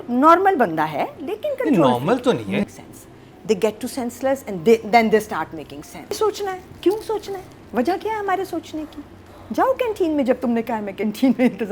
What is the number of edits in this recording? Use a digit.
2